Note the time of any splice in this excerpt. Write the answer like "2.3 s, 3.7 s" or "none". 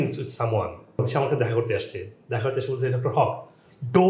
1.1 s